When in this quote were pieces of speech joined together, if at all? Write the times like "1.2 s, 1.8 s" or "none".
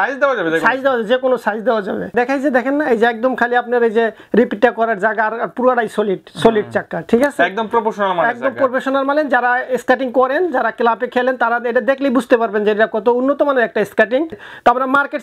2.1 s, 14.4 s